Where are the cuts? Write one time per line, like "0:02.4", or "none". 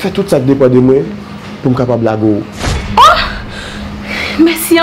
none